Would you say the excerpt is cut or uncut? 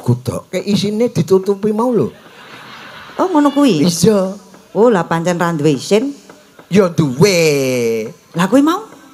uncut